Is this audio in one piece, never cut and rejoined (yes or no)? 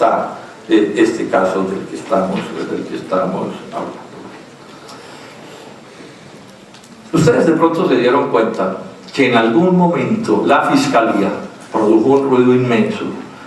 yes